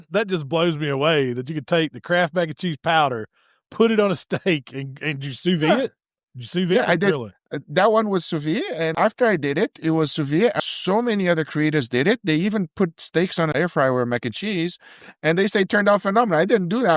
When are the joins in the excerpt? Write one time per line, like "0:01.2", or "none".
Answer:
0:08.9
0:10.5
0:13.5